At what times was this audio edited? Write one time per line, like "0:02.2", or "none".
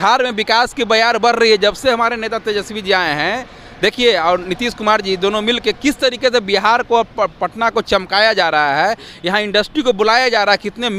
none